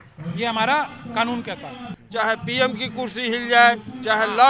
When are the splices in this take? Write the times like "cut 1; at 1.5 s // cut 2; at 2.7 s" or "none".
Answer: cut 1; at 2.0 s